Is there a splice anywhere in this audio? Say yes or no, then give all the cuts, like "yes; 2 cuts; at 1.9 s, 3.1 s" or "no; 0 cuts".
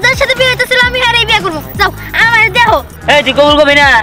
no; 0 cuts